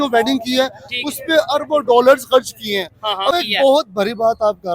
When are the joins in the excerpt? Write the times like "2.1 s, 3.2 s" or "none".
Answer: 3.3 s